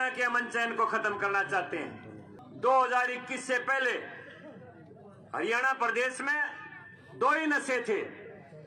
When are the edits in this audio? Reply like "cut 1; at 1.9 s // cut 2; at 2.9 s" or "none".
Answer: cut 1; at 2.3 s